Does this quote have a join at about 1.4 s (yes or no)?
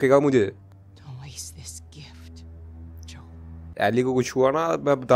no